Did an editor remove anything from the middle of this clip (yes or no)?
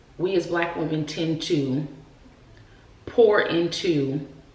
no